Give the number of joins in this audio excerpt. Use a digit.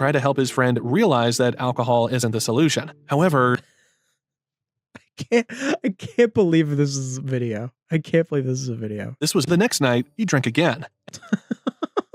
1